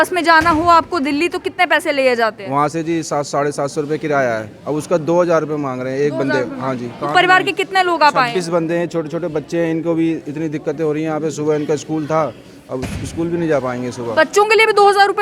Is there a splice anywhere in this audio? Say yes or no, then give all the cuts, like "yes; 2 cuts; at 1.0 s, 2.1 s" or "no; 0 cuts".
no; 0 cuts